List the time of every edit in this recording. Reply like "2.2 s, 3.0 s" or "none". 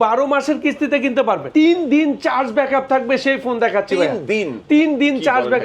1.4 s